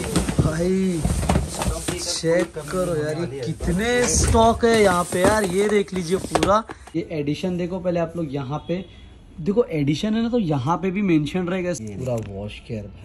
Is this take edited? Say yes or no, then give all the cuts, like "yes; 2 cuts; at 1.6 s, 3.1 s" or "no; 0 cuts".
yes; 2 cuts; at 6.9 s, 11.8 s